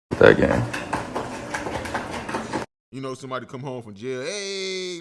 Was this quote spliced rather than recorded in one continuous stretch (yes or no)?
yes